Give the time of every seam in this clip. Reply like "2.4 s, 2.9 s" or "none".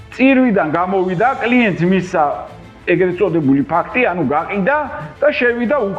none